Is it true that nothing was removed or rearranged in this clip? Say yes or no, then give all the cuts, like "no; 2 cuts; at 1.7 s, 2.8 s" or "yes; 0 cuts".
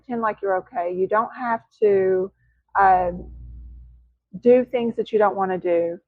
yes; 0 cuts